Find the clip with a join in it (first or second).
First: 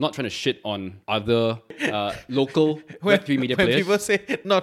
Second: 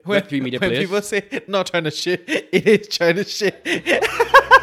first